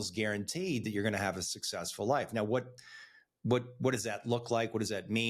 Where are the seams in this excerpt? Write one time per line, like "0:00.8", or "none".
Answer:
none